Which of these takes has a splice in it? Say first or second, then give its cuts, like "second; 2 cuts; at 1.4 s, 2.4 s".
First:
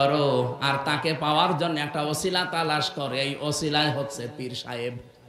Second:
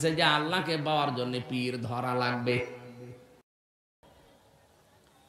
second; 1 cut; at 4.0 s